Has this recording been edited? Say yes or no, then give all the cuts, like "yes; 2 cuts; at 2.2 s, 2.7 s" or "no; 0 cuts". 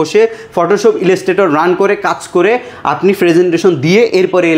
no; 0 cuts